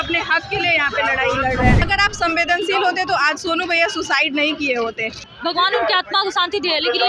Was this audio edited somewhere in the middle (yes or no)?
yes